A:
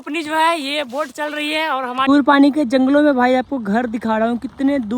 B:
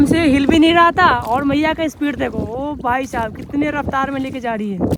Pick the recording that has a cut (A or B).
A